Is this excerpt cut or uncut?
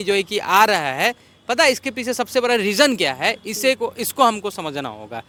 uncut